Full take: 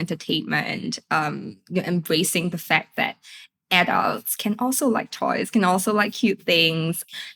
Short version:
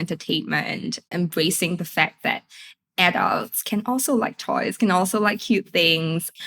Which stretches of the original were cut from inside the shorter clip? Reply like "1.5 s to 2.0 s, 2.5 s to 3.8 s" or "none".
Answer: 1.1 s to 1.8 s